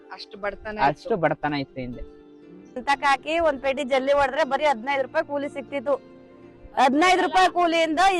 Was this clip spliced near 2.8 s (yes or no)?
yes